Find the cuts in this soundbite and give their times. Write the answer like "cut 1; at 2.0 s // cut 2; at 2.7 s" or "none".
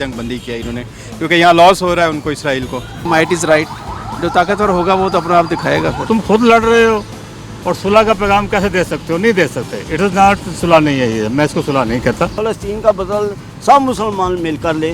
cut 1; at 3.0 s // cut 2; at 6.0 s // cut 3; at 12.4 s